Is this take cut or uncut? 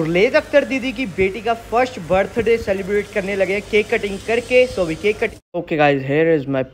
cut